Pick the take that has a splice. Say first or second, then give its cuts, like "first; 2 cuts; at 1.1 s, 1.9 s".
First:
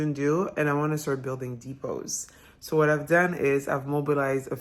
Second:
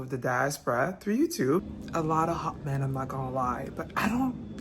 second; 1 cut; at 1.7 s